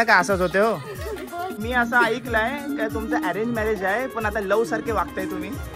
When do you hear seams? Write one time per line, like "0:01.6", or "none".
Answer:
0:01.6